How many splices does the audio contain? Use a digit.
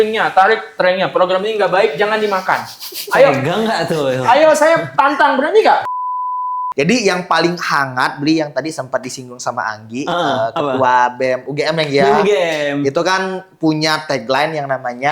1